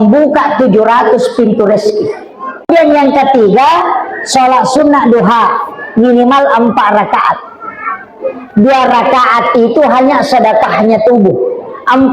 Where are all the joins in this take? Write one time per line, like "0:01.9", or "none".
0:02.7

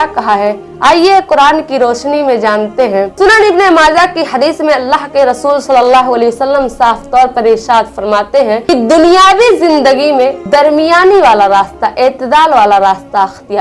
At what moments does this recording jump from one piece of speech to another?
0:03.1

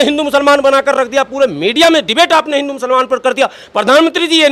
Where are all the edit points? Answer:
none

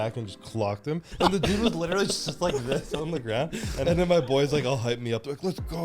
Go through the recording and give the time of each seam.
0:01.1
0:03.8

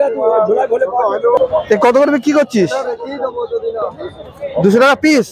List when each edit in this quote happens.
0:01.4

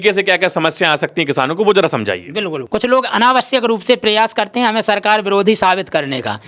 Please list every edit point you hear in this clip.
0:02.6

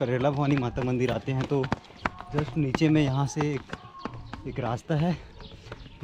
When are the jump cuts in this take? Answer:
none

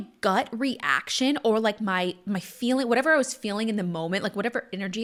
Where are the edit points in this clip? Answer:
none

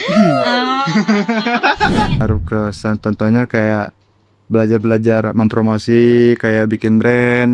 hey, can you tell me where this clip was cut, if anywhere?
0:02.2

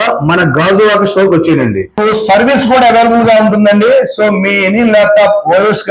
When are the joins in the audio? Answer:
0:01.9

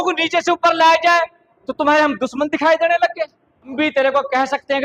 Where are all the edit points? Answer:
0:03.7

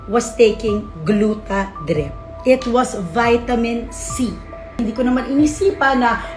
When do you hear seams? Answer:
0:04.8

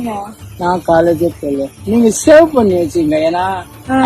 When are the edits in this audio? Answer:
0:01.8

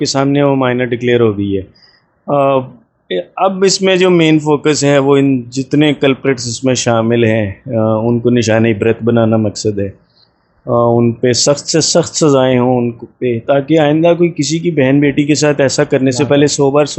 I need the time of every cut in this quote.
none

